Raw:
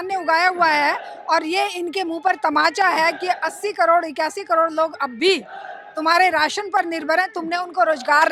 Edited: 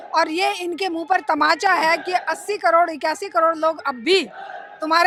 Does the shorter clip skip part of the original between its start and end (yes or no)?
no